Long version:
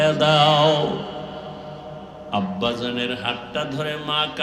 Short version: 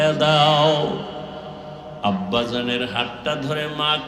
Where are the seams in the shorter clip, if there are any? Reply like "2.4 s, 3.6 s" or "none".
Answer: 1.9 s